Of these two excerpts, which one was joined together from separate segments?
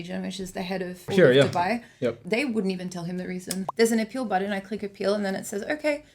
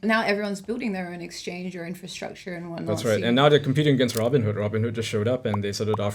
first; 3 cuts; at 1.0 s, 2.2 s, 3.6 s

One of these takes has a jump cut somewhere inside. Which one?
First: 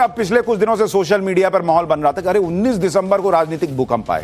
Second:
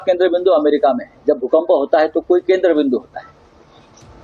first; 1 cut; at 2.4 s

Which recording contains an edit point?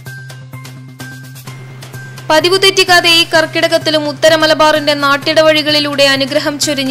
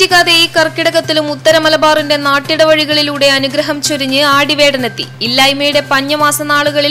first; 1 cut; at 1.0 s

